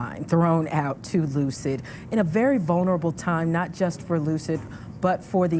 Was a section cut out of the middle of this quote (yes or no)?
no